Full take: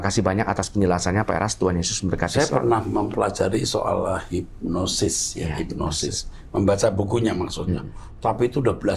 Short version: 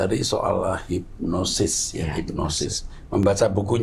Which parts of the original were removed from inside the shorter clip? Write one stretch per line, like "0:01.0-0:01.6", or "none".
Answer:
none